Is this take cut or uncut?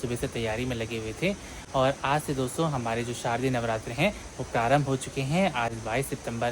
uncut